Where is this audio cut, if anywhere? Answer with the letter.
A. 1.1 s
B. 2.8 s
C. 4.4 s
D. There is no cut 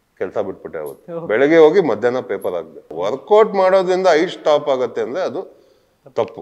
B